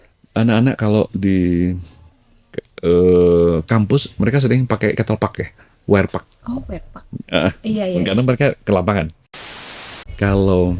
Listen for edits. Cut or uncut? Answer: cut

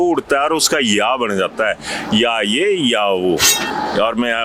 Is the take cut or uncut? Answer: uncut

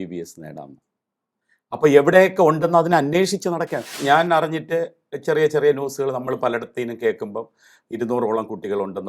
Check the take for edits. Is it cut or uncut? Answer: cut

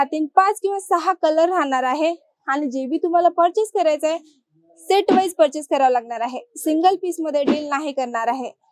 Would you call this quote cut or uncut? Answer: uncut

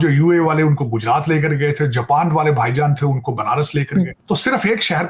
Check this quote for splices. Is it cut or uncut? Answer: cut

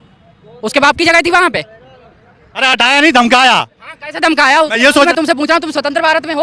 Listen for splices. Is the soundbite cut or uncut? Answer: uncut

